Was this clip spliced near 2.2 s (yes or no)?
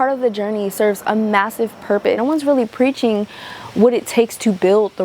yes